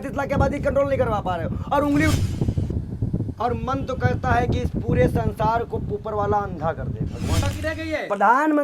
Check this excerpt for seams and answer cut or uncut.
cut